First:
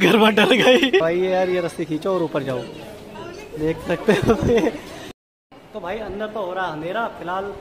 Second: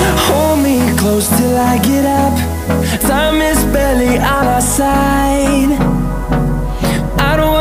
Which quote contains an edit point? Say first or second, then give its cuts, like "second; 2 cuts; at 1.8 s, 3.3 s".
first; 2 cuts; at 1.0 s, 5.2 s